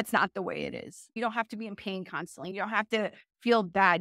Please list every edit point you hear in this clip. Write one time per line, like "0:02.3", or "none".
0:01.1
0:02.5